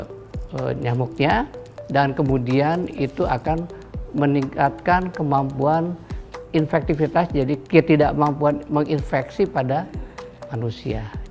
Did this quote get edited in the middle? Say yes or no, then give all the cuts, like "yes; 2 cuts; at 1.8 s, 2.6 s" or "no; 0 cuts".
yes; 2 cuts; at 6.4 s, 7.6 s